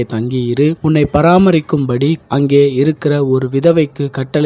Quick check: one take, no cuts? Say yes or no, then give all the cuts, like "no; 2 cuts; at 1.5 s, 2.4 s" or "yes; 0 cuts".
no; 2 cuts; at 0.8 s, 2.2 s